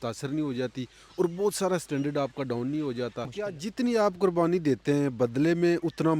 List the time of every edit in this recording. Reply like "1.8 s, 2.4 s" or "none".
3.3 s